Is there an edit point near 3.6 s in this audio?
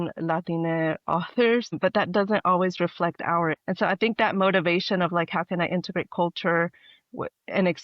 yes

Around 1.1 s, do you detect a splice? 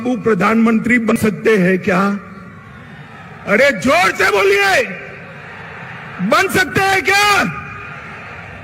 yes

